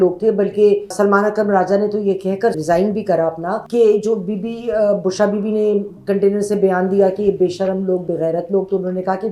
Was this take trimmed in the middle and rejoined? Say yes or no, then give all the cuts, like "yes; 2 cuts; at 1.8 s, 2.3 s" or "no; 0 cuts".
no; 0 cuts